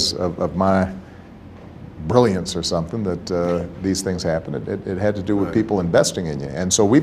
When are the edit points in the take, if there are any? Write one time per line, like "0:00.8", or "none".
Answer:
none

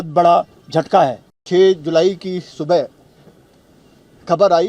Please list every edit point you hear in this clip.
0:01.3

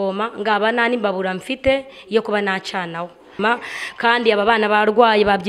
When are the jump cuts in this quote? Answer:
0:03.3

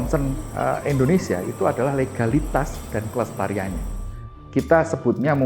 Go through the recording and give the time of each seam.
0:04.2

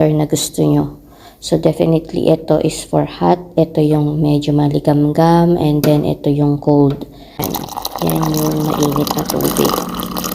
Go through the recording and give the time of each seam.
0:07.5

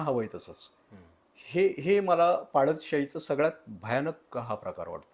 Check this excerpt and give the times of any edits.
none

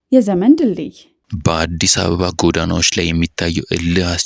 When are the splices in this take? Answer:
0:01.0

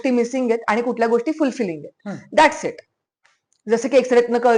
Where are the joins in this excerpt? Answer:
none

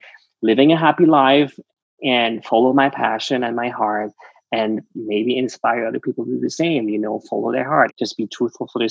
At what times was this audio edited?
0:07.9

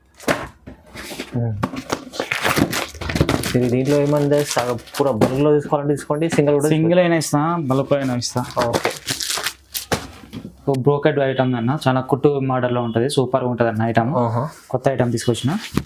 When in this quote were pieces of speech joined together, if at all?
0:10.6

